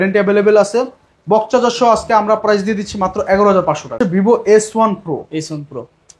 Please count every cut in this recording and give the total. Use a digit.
1